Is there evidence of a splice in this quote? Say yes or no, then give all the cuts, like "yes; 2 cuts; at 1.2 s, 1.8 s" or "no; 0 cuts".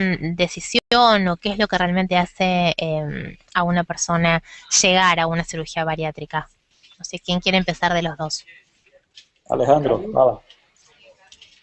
yes; 1 cut; at 6.3 s